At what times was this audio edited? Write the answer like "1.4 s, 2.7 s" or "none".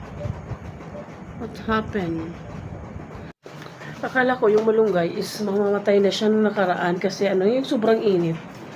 3.3 s